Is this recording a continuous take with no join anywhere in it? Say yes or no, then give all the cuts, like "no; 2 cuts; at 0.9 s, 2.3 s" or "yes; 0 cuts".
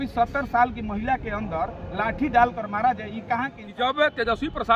no; 1 cut; at 3.6 s